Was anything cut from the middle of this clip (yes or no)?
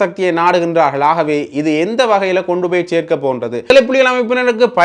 yes